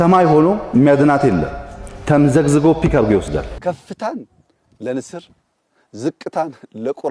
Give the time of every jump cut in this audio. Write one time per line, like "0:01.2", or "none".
0:03.5